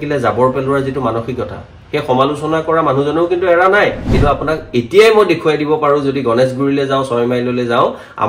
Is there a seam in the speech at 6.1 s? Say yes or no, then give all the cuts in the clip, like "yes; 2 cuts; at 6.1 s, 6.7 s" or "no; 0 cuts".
no; 1 cut; at 4.0 s